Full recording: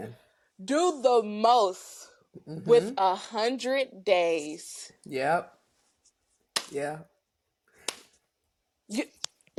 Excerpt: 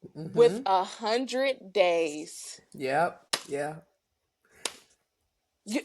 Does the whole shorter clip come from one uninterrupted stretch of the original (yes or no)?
no